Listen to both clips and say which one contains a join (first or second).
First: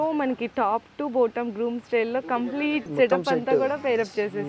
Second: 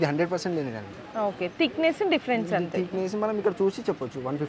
first